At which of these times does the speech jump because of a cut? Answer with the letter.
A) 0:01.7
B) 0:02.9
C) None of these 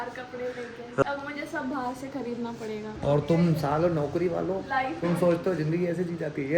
B